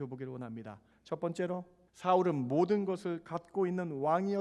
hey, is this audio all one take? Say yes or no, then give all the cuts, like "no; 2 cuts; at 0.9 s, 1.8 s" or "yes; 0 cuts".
no; 2 cuts; at 0.9 s, 1.8 s